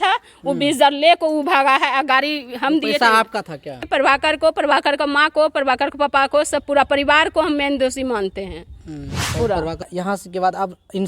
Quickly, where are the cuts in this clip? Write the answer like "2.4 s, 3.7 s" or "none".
3.8 s, 9.8 s